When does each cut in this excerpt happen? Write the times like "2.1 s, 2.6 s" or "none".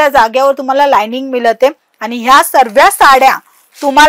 none